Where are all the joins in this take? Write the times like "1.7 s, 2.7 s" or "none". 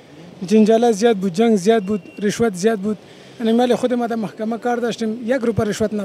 none